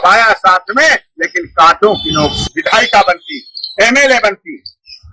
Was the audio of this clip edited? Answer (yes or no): yes